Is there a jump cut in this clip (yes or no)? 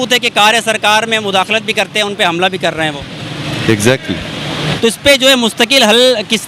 yes